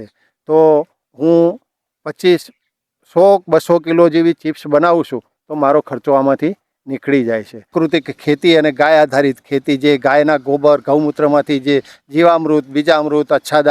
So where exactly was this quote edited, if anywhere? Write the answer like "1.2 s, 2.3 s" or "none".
7.7 s